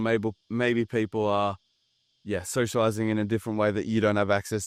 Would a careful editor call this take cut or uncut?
uncut